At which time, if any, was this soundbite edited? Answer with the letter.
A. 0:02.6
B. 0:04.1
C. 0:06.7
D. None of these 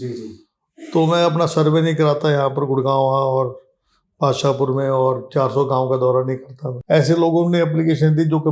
C